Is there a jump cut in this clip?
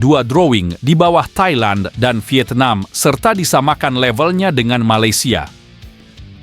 yes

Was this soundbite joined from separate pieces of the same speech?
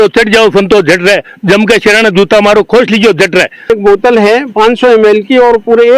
yes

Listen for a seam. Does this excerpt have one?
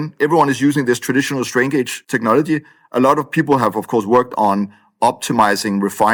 no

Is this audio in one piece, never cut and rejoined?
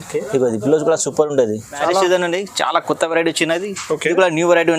no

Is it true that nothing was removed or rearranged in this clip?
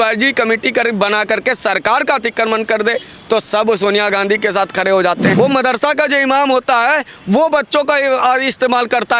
no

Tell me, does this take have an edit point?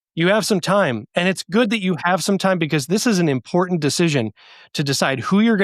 no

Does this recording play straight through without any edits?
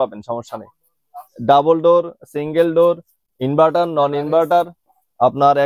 yes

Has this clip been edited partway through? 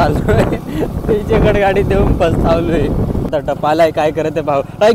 yes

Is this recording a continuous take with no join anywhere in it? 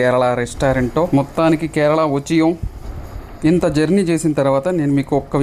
yes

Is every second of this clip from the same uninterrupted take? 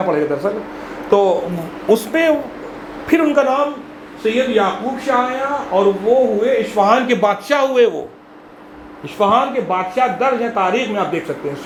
yes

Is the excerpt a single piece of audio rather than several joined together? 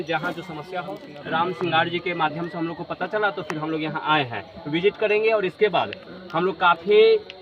no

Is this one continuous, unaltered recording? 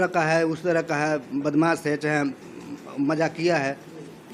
yes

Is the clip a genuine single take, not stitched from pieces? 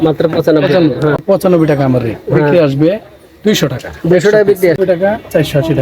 no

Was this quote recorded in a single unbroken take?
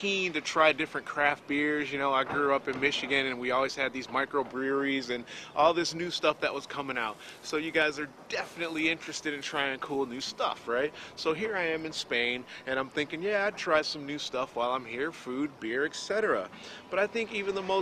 no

